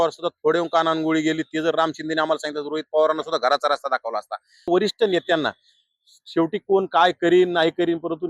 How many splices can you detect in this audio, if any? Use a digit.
1